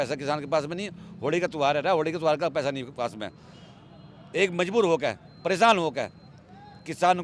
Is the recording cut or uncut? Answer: uncut